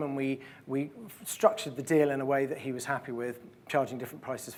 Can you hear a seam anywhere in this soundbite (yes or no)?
no